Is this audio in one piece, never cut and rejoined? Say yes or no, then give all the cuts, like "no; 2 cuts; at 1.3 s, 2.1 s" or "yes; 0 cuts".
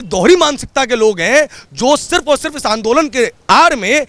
yes; 0 cuts